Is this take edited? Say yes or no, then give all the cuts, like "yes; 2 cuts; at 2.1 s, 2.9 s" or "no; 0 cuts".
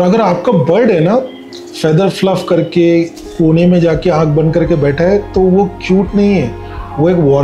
no; 0 cuts